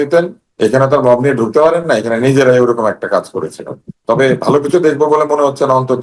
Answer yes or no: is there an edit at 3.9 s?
yes